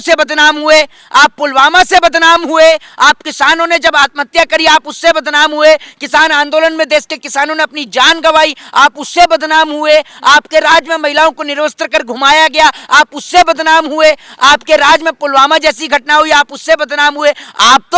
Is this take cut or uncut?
uncut